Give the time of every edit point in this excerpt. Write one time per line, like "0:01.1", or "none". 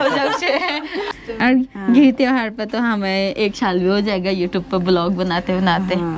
0:01.1